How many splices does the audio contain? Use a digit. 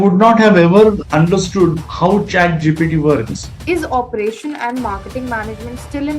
1